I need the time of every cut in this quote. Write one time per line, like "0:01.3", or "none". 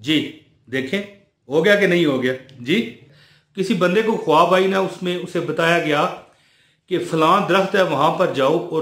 0:03.0